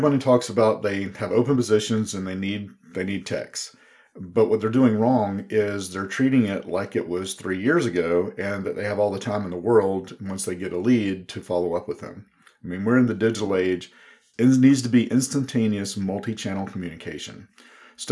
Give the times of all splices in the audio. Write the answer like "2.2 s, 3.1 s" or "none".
14.3 s